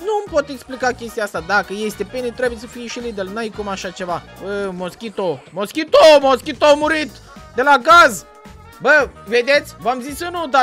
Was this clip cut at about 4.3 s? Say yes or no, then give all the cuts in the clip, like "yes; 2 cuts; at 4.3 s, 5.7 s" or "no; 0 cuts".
yes; 1 cut; at 4.3 s